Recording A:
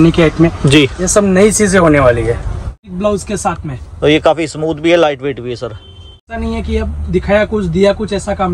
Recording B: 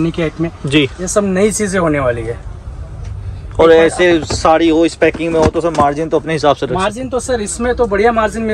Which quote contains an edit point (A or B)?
A